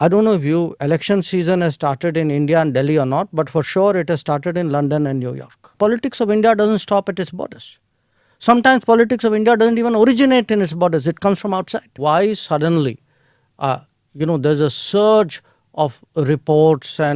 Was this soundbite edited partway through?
yes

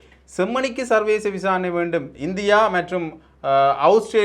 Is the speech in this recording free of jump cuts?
no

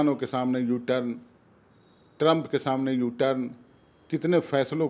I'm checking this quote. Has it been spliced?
no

